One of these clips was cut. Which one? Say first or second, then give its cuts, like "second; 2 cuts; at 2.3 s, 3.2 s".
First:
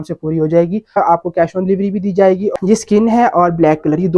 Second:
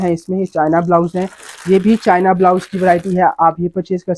first; 2 cuts; at 1.0 s, 2.4 s